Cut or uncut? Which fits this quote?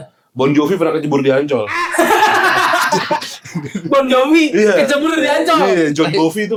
uncut